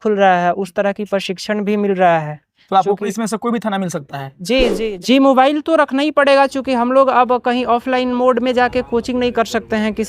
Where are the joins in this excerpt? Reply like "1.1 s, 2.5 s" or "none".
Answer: 4.7 s